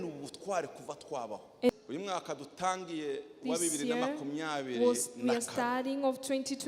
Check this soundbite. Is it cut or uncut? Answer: cut